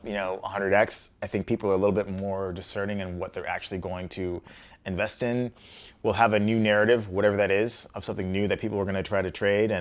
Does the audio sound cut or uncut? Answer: uncut